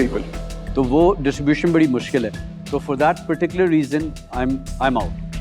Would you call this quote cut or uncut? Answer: uncut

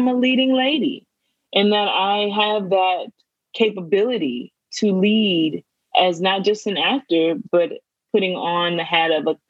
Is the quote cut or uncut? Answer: cut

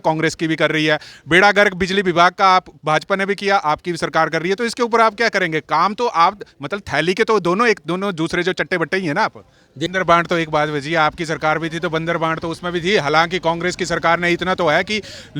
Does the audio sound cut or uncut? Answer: cut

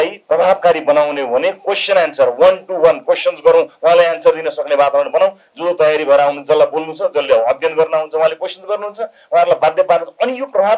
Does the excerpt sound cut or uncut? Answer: uncut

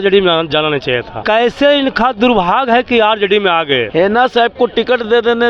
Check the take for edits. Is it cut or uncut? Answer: cut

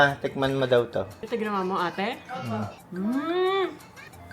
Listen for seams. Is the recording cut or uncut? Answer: cut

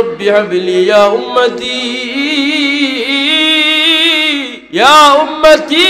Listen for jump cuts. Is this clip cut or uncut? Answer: cut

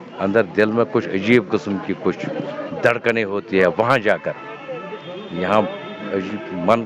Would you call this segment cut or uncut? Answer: uncut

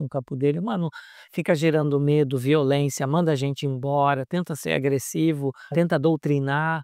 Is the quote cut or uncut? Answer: cut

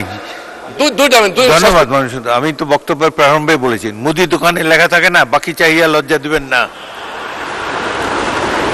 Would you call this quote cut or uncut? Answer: uncut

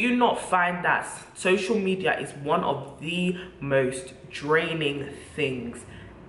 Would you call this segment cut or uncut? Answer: uncut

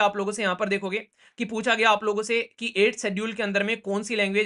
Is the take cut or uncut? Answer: uncut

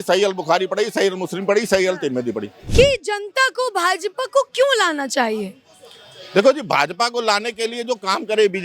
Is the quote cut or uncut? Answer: cut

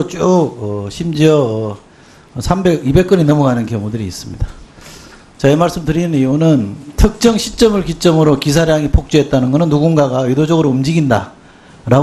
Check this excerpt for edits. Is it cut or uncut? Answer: uncut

